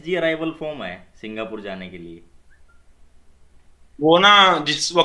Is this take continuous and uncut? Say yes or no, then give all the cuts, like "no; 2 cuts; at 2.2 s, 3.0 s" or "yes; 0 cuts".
yes; 0 cuts